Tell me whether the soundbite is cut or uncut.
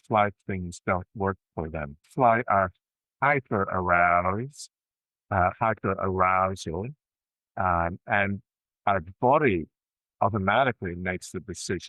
cut